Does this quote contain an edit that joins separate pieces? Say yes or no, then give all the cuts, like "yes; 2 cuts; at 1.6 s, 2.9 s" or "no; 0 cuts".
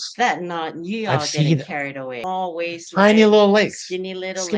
yes; 1 cut; at 2.1 s